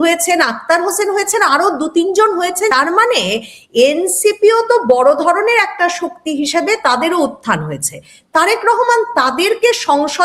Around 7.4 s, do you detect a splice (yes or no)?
no